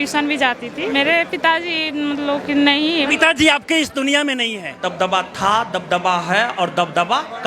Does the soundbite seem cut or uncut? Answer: cut